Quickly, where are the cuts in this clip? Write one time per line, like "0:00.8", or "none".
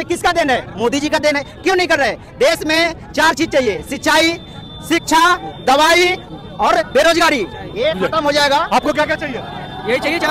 none